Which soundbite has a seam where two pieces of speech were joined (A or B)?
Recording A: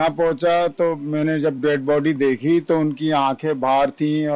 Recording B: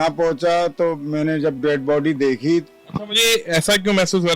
B